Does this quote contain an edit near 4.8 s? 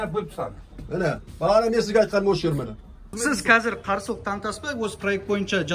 no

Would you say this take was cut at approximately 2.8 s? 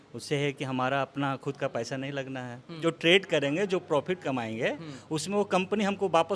yes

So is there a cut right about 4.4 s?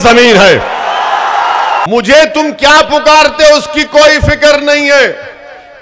no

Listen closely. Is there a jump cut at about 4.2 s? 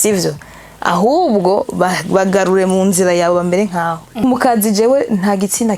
yes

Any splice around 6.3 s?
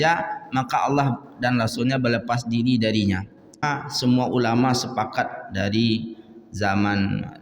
no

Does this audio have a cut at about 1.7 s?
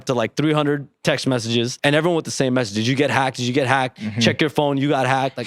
yes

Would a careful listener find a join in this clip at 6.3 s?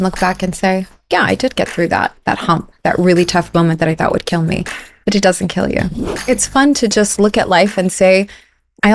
yes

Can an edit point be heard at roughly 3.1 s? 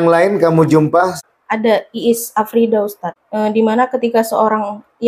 yes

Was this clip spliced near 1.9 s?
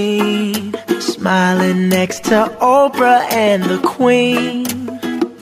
yes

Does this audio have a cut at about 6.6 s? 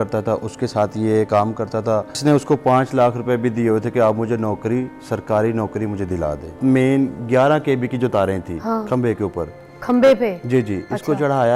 yes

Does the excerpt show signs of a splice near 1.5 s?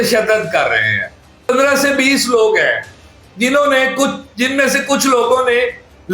yes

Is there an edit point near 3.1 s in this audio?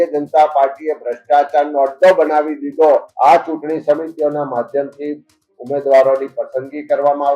yes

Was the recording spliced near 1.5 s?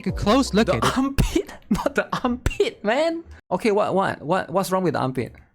no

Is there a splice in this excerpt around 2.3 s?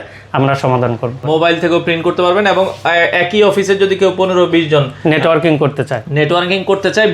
no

